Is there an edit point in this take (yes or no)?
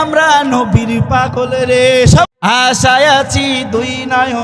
yes